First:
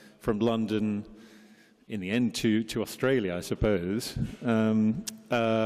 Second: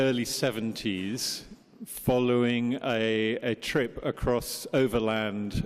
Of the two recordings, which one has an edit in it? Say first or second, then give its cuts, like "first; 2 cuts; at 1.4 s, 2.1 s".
second; 1 cut; at 4.1 s